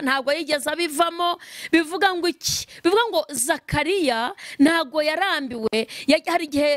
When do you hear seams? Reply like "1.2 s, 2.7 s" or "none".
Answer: none